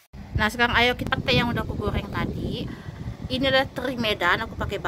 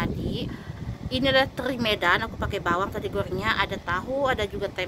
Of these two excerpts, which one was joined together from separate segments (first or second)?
first